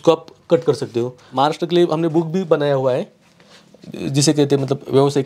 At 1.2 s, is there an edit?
yes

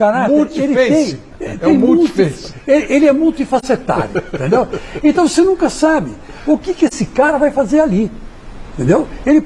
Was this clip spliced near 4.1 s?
yes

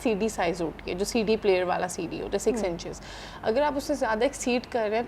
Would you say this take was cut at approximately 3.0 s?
no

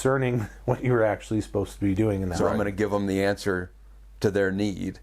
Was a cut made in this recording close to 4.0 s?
no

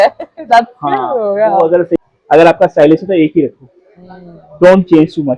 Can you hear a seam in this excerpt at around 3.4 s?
no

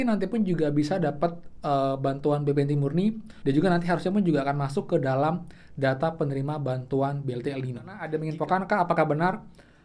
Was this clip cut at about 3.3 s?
yes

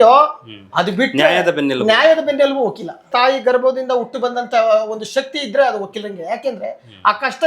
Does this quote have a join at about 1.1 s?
no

